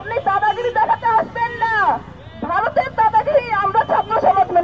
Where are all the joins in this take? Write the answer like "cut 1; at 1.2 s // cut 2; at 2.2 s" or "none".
none